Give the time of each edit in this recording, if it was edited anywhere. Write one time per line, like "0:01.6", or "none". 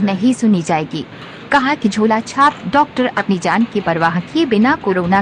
0:04.3